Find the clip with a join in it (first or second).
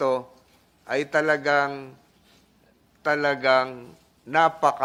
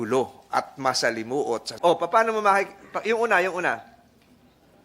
second